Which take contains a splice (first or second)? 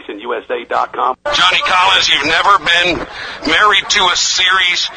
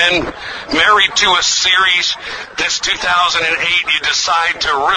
first